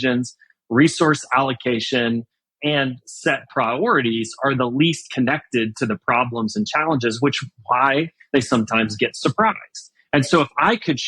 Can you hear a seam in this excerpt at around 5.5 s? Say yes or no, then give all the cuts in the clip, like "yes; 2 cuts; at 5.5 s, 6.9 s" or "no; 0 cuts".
no; 1 cut; at 2.5 s